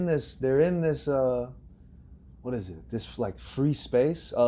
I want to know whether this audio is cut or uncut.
uncut